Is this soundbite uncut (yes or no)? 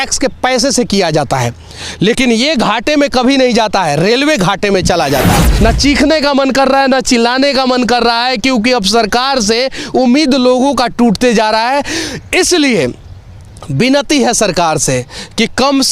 no